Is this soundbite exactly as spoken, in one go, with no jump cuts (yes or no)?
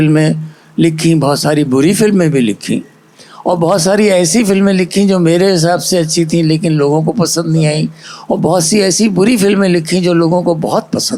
yes